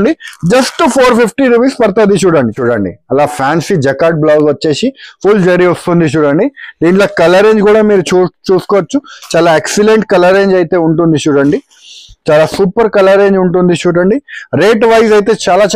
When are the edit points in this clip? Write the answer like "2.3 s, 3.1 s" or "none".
2.6 s

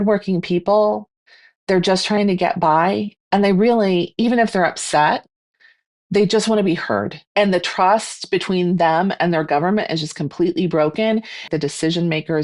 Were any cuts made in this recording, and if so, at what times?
7.2 s, 11.4 s

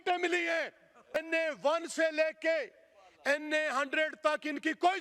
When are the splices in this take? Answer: 1.1 s

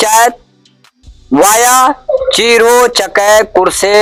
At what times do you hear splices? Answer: none

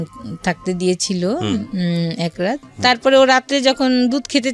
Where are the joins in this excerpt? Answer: 2.7 s

